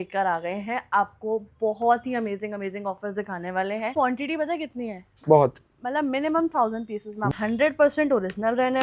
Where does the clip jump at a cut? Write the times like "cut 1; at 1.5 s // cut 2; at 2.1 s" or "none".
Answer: cut 1; at 3.9 s // cut 2; at 7.3 s